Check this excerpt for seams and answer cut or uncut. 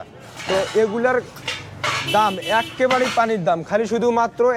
uncut